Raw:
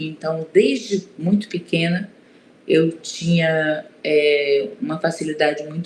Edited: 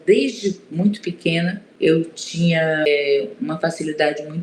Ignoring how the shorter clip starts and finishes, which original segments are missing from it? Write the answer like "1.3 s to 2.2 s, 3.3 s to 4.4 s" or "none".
2.1 s to 2.5 s, 3.7 s to 4.3 s